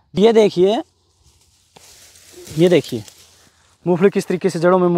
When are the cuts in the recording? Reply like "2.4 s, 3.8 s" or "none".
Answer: none